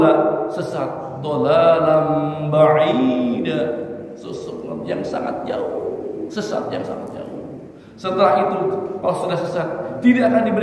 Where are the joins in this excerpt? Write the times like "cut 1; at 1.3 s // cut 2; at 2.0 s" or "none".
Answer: none